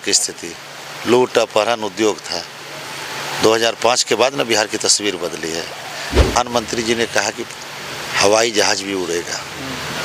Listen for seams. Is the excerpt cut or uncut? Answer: cut